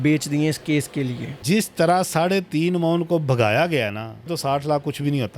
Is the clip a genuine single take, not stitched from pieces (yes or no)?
no